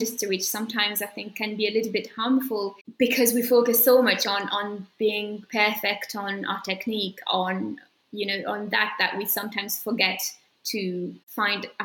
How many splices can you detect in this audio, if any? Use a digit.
0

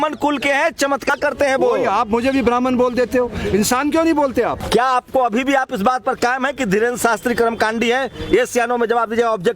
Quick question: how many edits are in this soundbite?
2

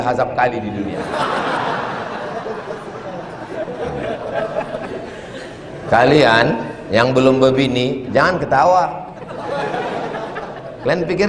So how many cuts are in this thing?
0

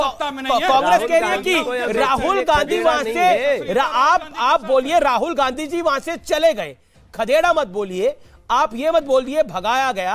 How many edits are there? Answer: 0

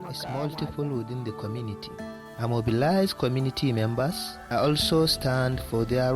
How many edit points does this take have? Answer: 2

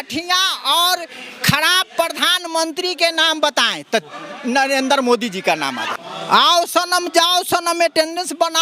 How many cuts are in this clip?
1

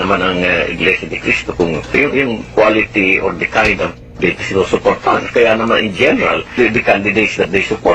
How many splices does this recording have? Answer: 2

